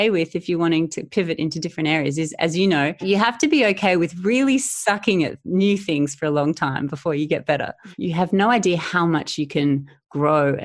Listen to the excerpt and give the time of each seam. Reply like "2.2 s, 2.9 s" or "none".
3.0 s, 7.8 s